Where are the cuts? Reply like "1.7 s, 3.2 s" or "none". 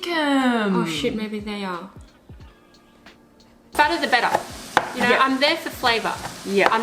3.7 s